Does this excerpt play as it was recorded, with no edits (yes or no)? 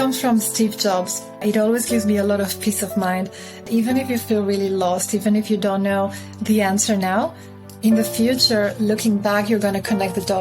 no